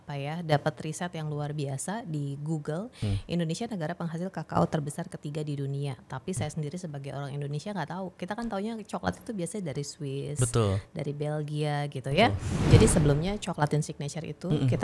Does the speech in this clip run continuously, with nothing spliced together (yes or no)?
no